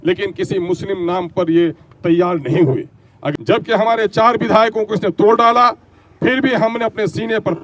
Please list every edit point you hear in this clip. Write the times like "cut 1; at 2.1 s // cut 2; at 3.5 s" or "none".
cut 1; at 3.2 s

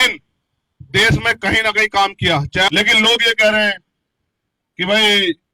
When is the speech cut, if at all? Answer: cut 1; at 2.7 s

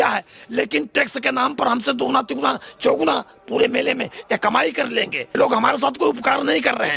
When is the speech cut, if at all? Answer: cut 1; at 5.4 s

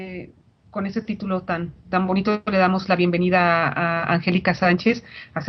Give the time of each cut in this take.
cut 1; at 1.1 s

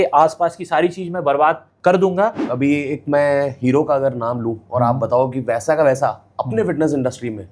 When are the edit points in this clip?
cut 1; at 1.7 s // cut 2; at 2.4 s

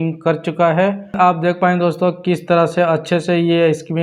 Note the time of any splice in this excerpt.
cut 1; at 1.1 s

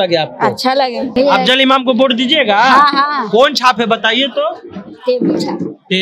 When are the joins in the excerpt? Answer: cut 1; at 1.1 s

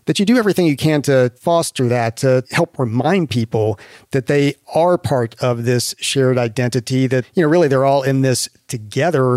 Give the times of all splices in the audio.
cut 1; at 1.4 s // cut 2; at 2.4 s // cut 3; at 7.3 s

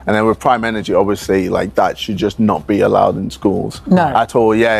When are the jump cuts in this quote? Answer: none

